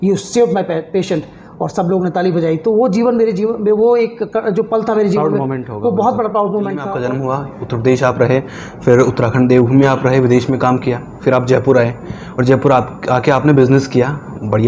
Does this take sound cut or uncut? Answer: cut